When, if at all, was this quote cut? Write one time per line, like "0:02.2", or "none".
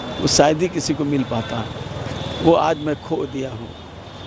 none